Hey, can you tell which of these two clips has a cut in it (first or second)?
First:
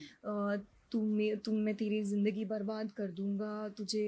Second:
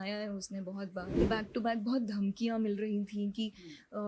second